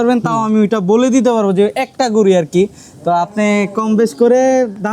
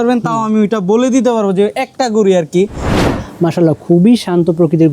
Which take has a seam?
second; 1 cut; at 2.9 s

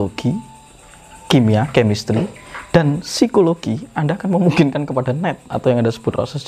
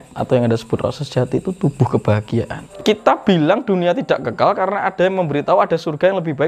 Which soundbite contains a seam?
second; 1 cut; at 2.6 s

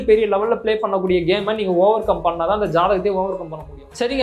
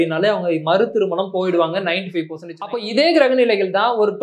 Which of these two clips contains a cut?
second; 1 cut; at 2.9 s

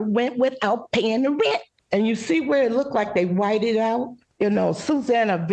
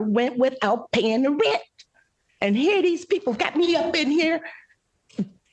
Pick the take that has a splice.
first; 2 cuts; at 1.7 s, 4.2 s

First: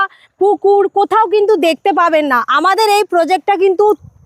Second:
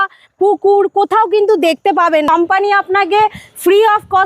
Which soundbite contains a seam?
second; 1 cut; at 2.3 s

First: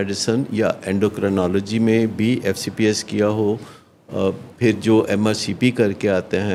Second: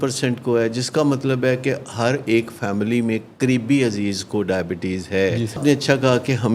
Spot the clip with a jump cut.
second; 1 cut; at 5.6 s

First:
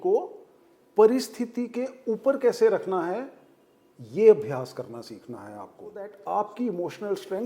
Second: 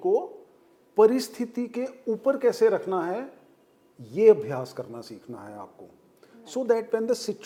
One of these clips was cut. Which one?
first; 1 cut; at 6.1 s

